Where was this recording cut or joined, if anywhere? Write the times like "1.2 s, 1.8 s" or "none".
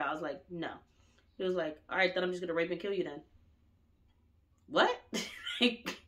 none